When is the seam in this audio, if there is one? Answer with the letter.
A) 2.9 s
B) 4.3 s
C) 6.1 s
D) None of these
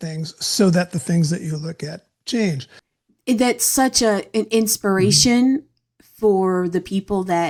D